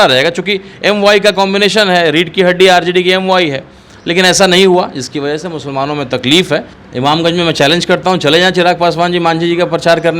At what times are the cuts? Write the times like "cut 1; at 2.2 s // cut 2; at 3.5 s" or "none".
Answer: cut 1; at 6.8 s